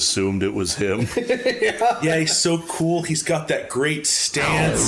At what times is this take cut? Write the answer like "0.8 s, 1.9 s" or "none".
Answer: none